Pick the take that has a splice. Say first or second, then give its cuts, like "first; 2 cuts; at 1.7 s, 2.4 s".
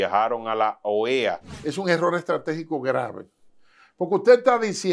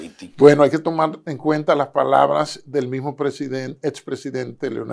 first; 1 cut; at 1.5 s